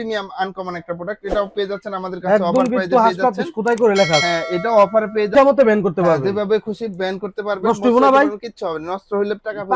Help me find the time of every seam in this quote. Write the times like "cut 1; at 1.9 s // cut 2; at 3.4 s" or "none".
cut 1; at 2.2 s // cut 2; at 5.3 s